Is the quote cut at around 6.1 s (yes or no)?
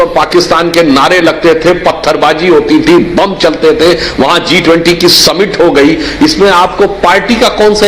yes